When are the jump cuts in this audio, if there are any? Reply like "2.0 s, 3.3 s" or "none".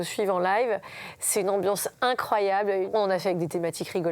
2.9 s